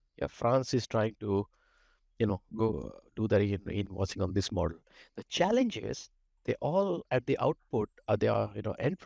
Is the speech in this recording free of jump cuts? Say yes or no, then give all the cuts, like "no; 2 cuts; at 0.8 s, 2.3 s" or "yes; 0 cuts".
yes; 0 cuts